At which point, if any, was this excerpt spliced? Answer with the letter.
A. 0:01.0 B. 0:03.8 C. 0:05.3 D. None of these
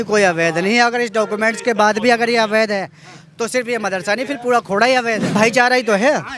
C